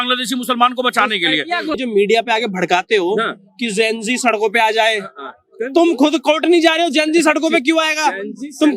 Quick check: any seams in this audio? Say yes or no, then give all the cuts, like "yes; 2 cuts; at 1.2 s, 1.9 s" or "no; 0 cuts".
yes; 1 cut; at 1.8 s